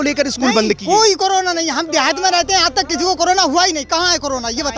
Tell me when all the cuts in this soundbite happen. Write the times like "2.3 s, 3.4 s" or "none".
none